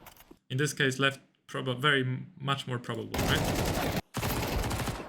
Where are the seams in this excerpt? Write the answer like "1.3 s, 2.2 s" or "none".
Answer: 4.0 s